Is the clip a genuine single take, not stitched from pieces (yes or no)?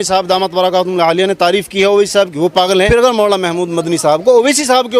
no